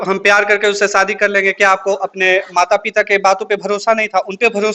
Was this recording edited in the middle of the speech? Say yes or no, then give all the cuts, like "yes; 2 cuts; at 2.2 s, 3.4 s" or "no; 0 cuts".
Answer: no; 0 cuts